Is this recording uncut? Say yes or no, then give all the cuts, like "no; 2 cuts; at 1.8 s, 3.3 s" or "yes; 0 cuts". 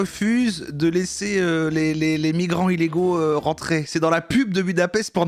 yes; 0 cuts